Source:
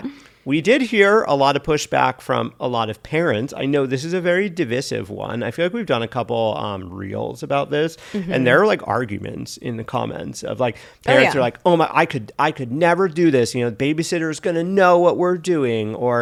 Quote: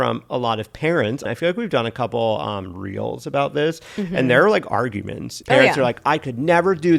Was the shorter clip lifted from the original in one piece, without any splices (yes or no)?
no